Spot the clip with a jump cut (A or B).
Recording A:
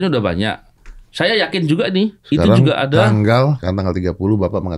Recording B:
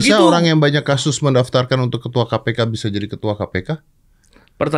A